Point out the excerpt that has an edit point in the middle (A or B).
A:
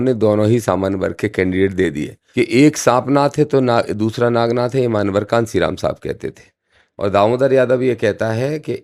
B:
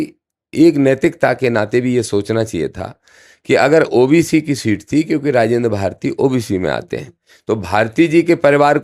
A